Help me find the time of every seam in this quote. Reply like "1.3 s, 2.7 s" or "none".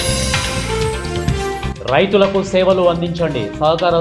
none